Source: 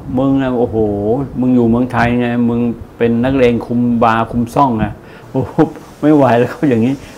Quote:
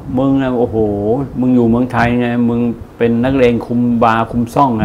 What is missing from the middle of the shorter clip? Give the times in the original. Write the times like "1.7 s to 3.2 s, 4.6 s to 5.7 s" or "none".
none